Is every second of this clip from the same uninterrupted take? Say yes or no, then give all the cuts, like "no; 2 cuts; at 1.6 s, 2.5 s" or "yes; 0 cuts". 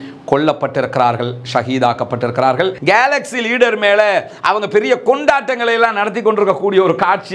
no; 1 cut; at 2.8 s